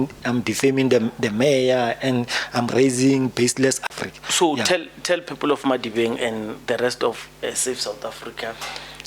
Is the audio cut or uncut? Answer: cut